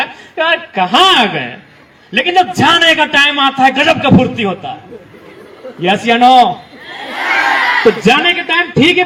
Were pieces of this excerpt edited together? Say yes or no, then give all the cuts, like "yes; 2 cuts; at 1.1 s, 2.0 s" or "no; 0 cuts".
no; 0 cuts